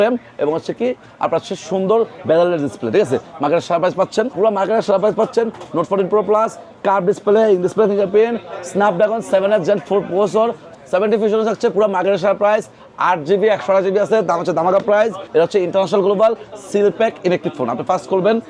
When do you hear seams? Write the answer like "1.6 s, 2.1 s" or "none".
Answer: 4.3 s, 10.7 s, 15.2 s

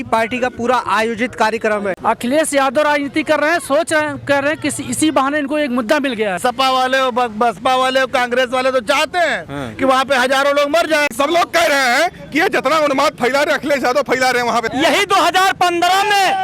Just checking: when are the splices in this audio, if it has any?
2.0 s, 6.4 s, 11.1 s, 14.7 s

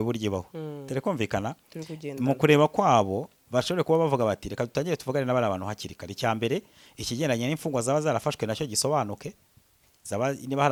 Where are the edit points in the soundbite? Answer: none

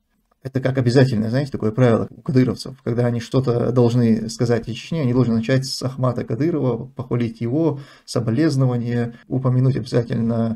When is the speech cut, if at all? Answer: 2.1 s

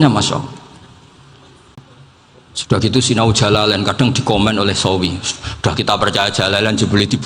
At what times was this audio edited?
1.8 s

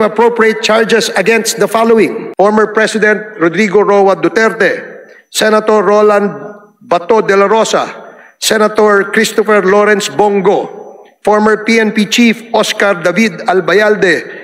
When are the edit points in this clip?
2.2 s

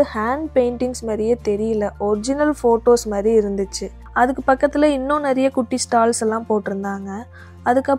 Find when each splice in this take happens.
none

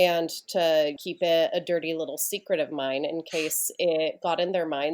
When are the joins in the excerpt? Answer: 1.0 s

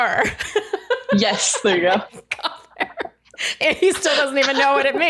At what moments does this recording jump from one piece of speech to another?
none

